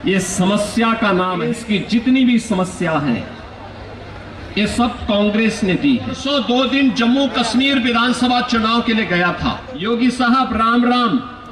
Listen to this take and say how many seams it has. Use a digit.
3